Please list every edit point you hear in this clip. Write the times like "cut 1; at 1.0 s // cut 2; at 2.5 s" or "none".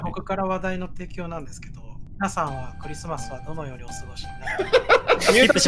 cut 1; at 2.0 s

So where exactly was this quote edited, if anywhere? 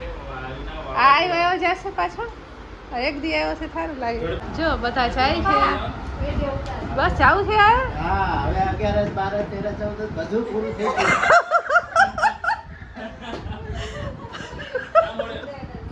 cut 1; at 4.4 s

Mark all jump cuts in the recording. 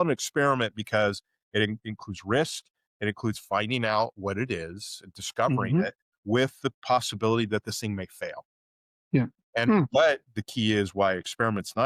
none

